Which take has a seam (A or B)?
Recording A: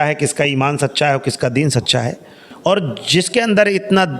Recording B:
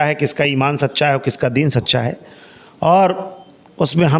A